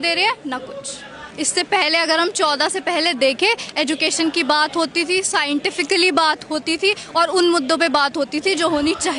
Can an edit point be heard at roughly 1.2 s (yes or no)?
yes